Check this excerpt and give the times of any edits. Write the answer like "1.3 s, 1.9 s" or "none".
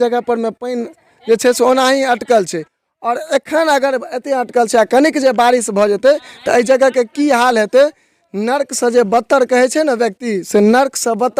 none